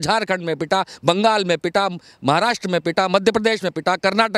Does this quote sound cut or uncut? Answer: uncut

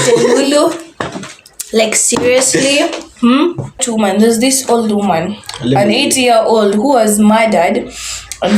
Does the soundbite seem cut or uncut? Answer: cut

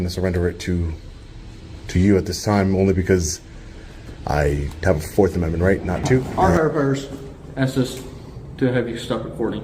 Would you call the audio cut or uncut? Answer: cut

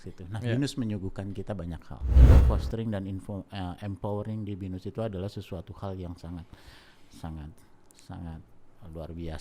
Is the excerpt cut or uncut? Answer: cut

